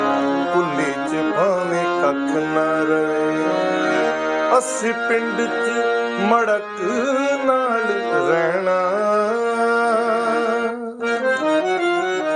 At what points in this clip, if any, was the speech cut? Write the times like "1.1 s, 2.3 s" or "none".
none

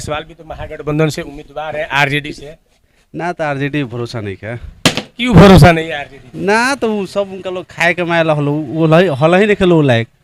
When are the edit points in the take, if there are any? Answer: none

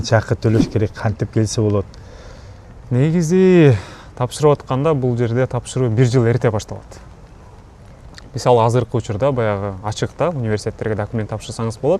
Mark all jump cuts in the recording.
none

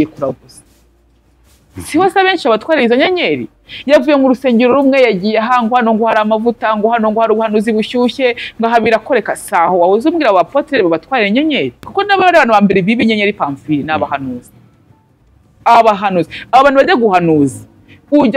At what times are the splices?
11.8 s

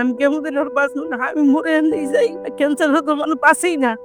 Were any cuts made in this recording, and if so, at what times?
none

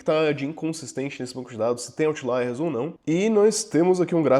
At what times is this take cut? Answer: 3.0 s

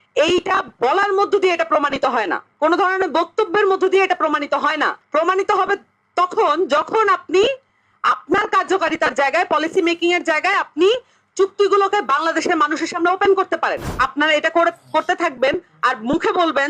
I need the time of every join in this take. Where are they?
2.4 s, 5.0 s, 13.9 s

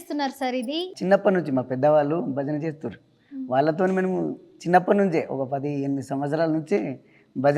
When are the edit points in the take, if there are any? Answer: 0.9 s

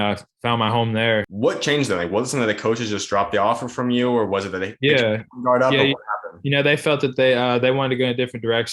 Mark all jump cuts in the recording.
1.3 s

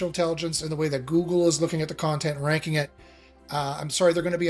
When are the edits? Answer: none

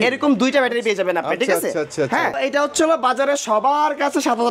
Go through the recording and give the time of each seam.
2.4 s

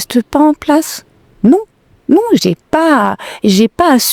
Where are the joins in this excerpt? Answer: none

